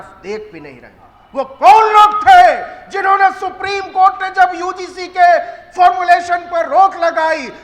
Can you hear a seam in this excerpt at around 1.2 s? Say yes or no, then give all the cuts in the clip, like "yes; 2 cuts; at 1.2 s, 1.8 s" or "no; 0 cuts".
yes; 1 cut; at 1.2 s